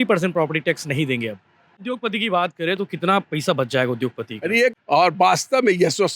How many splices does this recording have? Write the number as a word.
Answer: two